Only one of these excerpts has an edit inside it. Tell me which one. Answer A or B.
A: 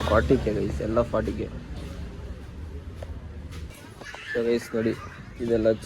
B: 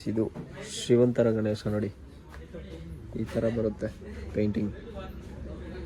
A